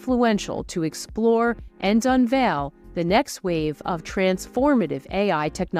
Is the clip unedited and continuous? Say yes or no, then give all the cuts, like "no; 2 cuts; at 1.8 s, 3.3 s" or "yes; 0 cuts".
yes; 0 cuts